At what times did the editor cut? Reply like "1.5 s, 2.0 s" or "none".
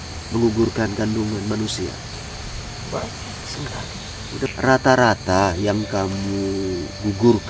2.1 s, 4.5 s